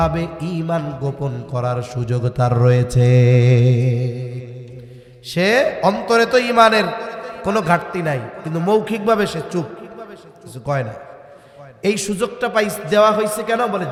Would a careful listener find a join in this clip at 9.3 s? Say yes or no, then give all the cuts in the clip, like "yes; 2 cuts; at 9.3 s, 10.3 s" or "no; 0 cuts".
no; 0 cuts